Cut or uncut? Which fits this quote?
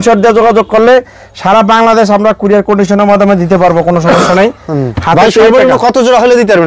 uncut